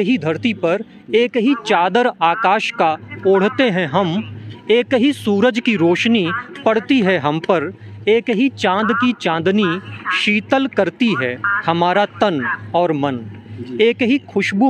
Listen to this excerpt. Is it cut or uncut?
uncut